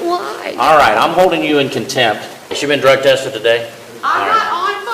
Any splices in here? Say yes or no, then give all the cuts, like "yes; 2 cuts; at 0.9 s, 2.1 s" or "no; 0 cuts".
yes; 2 cuts; at 2.5 s, 3.8 s